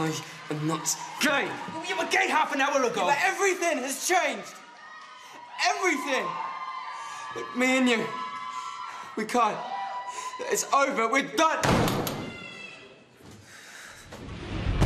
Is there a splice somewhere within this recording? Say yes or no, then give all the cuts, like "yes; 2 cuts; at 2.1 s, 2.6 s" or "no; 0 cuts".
no; 0 cuts